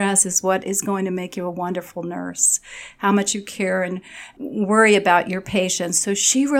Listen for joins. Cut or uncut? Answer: cut